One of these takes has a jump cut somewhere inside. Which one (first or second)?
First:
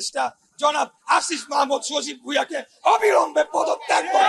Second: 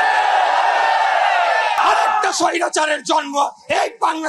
second